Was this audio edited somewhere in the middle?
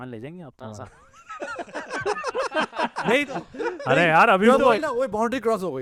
no; 0 cuts

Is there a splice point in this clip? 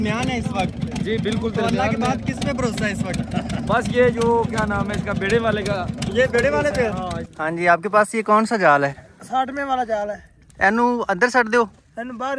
yes; 1 cut; at 7.2 s

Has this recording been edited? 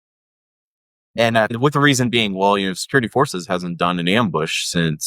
yes; 1 cut; at 1.5 s

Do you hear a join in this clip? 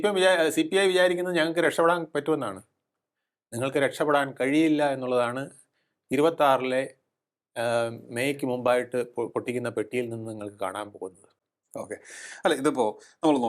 no; 0 cuts

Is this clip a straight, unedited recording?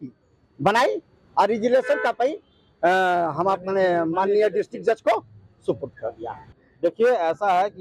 no; 1 cut; at 6.6 s

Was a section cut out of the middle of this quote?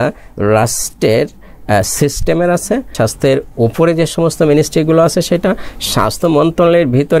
yes; 1 cut; at 2.9 s

